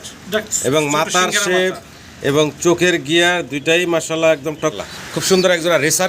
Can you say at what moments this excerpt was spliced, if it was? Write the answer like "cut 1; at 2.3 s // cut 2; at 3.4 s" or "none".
cut 1; at 4.8 s